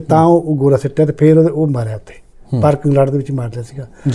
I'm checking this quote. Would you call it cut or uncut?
uncut